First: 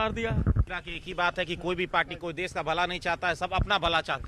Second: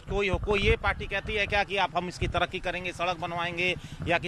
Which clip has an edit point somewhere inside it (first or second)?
first